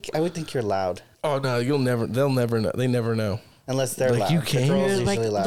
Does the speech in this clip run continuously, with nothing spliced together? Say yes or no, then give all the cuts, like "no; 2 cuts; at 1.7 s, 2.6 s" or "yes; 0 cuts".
no; 2 cuts; at 1.1 s, 3.5 s